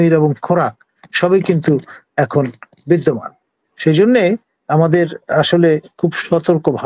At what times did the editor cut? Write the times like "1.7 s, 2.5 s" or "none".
none